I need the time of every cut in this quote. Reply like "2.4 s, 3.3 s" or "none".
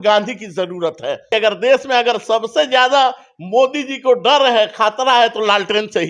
1.3 s